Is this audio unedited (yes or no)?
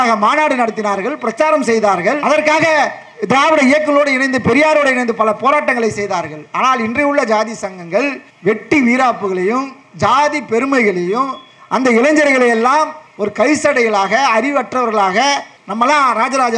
yes